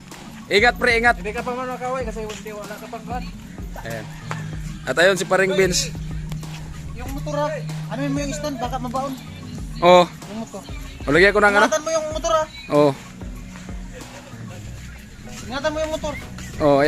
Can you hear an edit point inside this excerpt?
no; 0 cuts

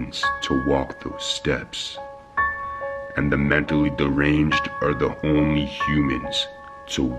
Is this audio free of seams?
yes; 0 cuts

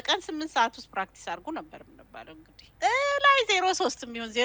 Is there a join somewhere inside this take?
yes; 1 cut; at 2.6 s

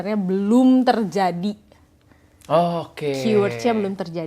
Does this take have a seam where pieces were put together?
no; 0 cuts

